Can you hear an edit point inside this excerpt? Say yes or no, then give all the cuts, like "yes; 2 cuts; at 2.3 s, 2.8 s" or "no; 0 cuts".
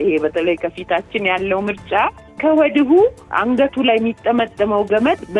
no; 0 cuts